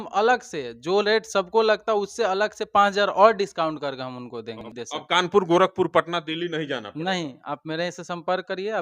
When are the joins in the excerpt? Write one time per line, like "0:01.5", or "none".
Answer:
0:04.7